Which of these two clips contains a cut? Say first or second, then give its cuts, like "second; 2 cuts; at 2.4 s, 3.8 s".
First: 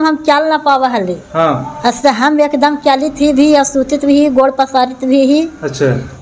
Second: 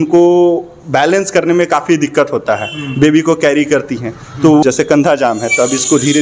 second; 1 cut; at 4.6 s